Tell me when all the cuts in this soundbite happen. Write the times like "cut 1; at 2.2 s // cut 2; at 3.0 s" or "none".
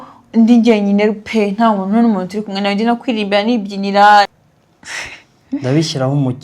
cut 1; at 4.3 s